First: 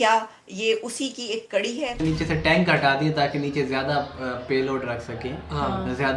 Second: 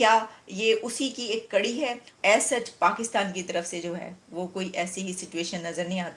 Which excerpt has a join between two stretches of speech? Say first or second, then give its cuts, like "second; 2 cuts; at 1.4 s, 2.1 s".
first; 1 cut; at 2.0 s